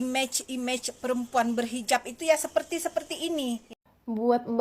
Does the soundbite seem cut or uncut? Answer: cut